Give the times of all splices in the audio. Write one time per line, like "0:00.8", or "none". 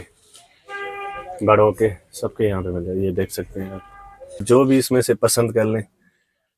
0:04.4